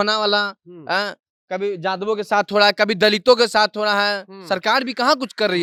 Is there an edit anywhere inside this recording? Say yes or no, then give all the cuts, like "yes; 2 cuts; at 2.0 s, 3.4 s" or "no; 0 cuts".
no; 0 cuts